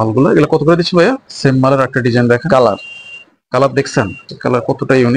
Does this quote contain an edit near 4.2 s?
yes; 2 cuts; at 1.3 s, 4.2 s

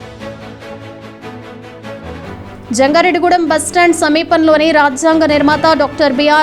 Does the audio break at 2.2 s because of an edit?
yes; 1 cut; at 2.2 s

